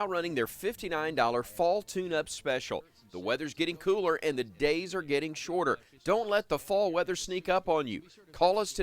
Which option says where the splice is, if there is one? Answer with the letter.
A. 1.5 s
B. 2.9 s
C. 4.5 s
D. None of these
B